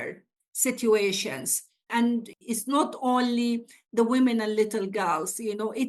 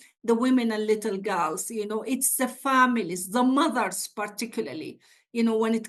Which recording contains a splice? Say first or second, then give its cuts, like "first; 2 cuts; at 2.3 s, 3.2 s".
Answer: first; 1 cut; at 2.3 s